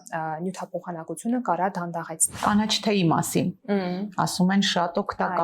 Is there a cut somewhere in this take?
yes; 1 cut; at 2.4 s

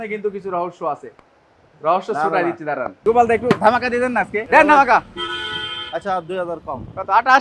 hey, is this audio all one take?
no; 2 cuts; at 3.0 s, 4.4 s

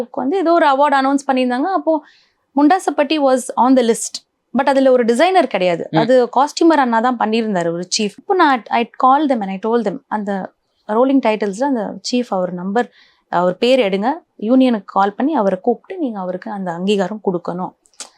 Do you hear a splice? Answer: no; 0 cuts

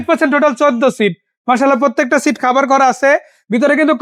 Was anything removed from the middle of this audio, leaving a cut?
no; 0 cuts

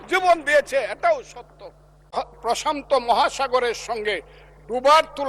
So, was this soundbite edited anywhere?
yes; 1 cut; at 2.1 s

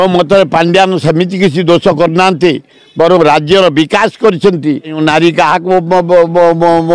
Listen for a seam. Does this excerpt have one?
yes; 1 cut; at 5.0 s

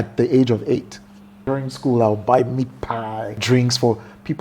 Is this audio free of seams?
no; 2 cuts; at 1.4 s, 3.4 s

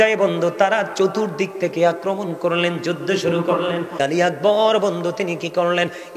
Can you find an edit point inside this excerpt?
yes; 1 cut; at 4.0 s

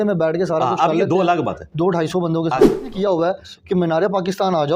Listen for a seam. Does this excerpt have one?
yes; 1 cut; at 2.9 s

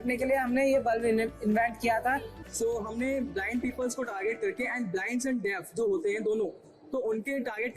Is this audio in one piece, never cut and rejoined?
no; 1 cut; at 2.3 s

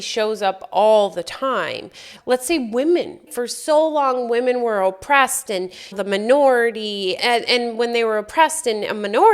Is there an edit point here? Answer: yes; 2 cuts; at 2.1 s, 3.3 s

